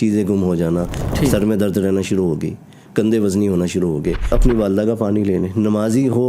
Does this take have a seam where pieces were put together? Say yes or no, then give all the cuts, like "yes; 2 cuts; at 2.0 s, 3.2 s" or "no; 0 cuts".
yes; 2 cuts; at 1.0 s, 4.2 s